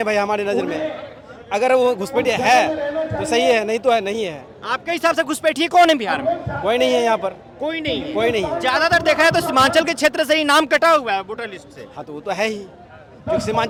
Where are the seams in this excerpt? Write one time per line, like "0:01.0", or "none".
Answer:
none